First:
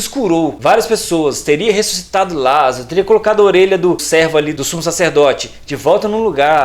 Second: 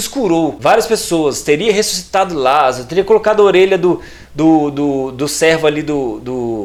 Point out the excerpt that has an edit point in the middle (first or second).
first